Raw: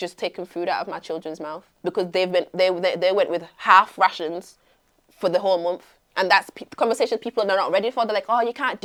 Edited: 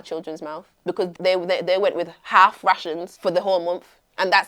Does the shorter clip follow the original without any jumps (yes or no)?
no